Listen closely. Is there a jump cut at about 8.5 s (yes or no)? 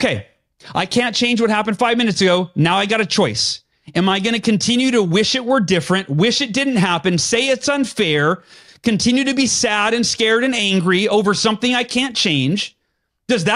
no